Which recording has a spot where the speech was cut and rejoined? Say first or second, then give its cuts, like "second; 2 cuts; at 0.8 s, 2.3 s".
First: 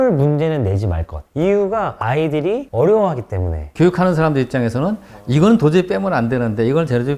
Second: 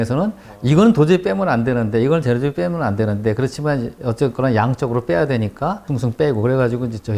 first; 2 cuts; at 1.1 s, 3.6 s